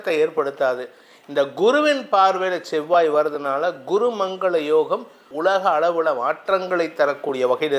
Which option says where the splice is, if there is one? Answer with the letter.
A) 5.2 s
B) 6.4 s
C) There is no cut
A